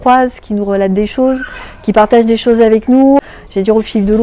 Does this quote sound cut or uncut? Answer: cut